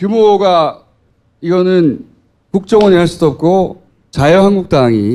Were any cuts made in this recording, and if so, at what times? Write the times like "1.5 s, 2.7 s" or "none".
none